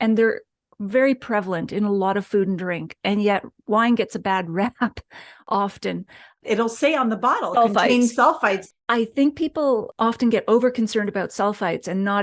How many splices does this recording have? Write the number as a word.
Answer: two